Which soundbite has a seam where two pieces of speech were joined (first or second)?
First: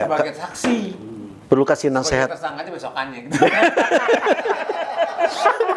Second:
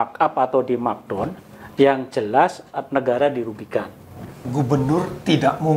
second